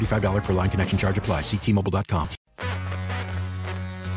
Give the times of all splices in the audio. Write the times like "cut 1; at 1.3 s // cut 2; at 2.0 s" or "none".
cut 1; at 2.4 s